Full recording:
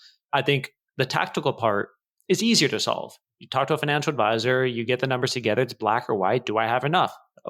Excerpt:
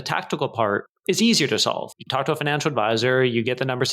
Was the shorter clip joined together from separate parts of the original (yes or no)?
yes